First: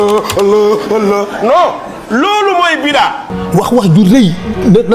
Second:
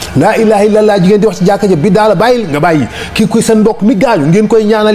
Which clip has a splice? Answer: first; 1 cut; at 3.2 s

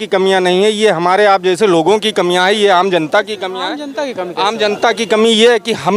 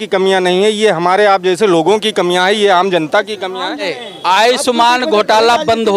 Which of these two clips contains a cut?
second; 1 cut; at 3.9 s

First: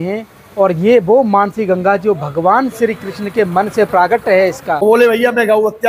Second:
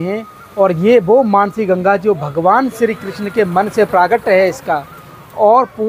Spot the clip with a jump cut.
first; 1 cut; at 4.8 s

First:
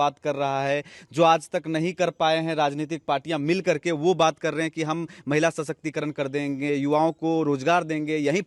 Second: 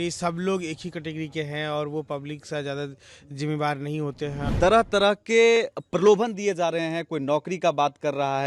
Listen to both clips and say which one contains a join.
second; 1 cut; at 4.4 s

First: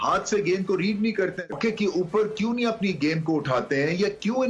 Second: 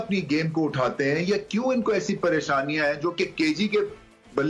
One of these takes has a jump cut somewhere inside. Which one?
first; 1 cut; at 1.6 s

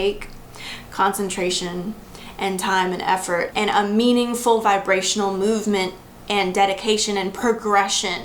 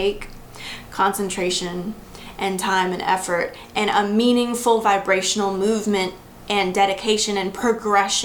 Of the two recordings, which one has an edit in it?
first; 1 cut; at 3.5 s

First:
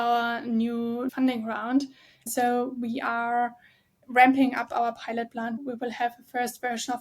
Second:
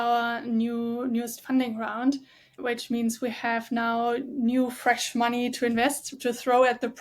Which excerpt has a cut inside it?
first; 3 cuts; at 1.1 s, 2.3 s, 5.6 s

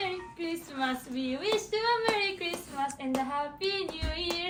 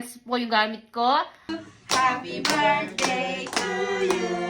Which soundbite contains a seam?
second; 1 cut; at 1.5 s

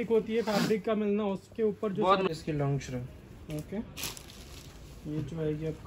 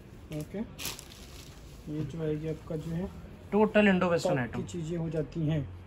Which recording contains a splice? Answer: first; 1 cut; at 2.3 s

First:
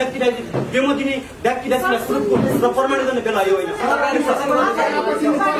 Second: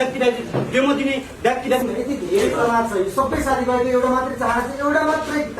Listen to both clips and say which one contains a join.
second; 1 cut; at 1.8 s

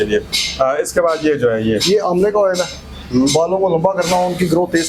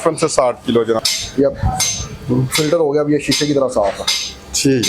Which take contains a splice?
second; 1 cut; at 1.0 s

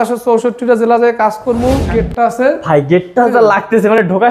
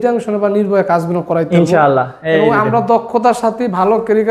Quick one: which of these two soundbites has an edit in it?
first; 1 cut; at 1.9 s

